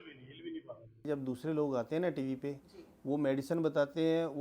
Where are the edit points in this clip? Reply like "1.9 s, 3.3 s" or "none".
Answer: 1.1 s